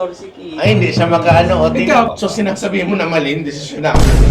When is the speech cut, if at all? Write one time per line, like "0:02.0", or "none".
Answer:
0:02.1